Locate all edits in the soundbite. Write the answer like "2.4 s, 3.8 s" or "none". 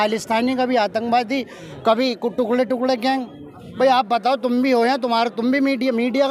none